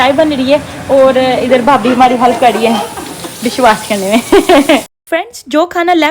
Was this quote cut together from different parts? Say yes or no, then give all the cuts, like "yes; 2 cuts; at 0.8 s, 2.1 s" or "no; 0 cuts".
no; 0 cuts